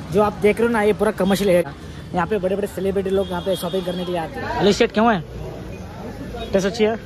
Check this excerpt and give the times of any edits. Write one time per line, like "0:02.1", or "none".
0:01.6
0:04.4